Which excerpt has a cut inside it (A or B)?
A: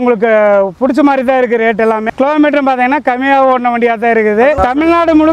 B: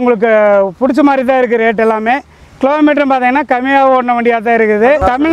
A